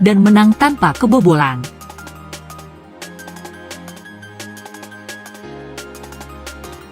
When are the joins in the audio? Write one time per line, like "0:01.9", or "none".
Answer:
none